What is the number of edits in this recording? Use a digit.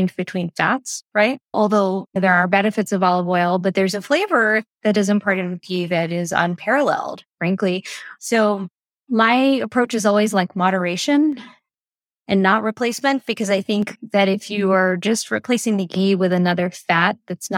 1